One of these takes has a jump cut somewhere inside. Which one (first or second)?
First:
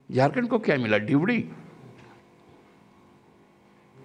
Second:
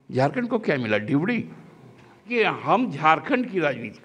second